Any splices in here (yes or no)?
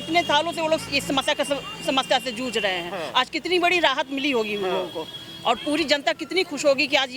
no